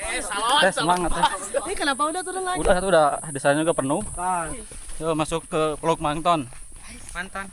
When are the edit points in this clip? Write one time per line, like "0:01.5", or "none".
0:04.6